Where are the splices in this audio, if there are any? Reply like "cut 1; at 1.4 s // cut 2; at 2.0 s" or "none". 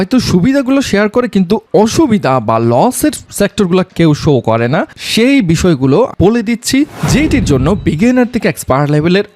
cut 1; at 6.1 s